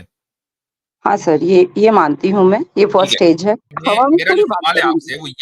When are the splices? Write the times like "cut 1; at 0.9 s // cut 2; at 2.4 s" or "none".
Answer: cut 1; at 3.8 s